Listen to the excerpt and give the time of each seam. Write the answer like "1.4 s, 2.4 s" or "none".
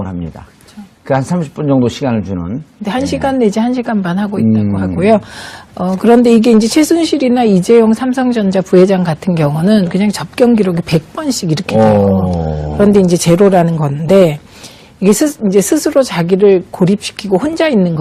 4.9 s